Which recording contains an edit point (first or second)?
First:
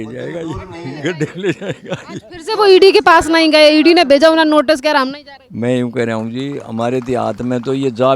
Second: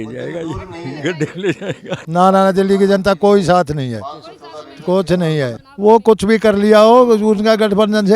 second